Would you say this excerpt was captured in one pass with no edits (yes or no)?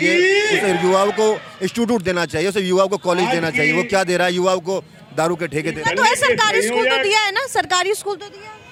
yes